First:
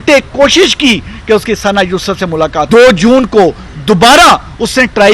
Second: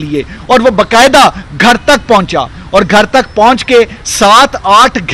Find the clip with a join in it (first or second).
first